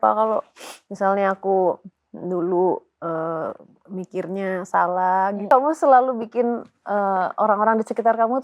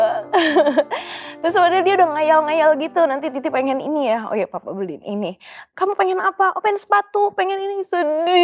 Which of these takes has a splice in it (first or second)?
first